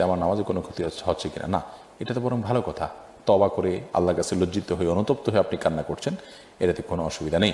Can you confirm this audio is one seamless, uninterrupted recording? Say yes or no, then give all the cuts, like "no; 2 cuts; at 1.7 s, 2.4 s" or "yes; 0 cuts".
yes; 0 cuts